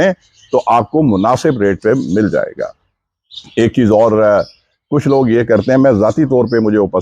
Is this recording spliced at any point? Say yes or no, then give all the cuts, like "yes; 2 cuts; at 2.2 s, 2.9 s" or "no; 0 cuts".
no; 0 cuts